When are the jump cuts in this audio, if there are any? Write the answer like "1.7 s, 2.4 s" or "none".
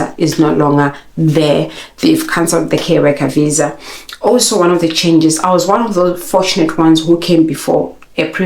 none